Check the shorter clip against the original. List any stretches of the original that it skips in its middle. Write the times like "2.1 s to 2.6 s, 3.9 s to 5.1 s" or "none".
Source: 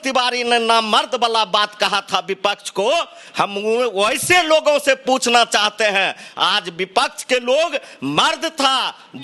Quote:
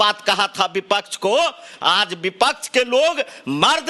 3.2 s to 6.2 s